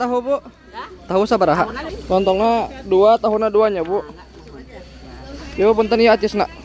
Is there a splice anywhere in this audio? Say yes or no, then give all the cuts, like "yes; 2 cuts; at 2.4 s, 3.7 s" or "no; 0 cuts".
yes; 1 cut; at 1.9 s